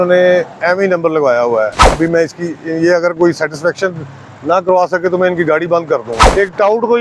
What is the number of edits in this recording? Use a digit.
1